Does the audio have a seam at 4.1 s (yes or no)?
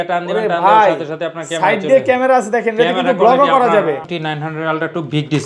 yes